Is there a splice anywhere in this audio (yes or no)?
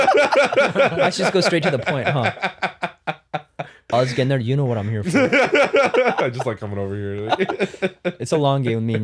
yes